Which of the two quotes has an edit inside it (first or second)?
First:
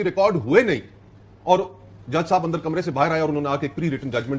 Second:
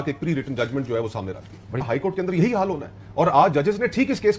second